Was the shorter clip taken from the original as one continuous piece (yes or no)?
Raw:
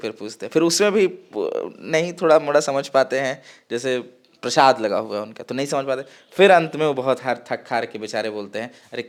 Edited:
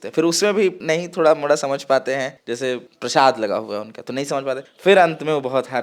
no